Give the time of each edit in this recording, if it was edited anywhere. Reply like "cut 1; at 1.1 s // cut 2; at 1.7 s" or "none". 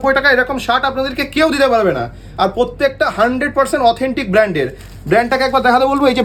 none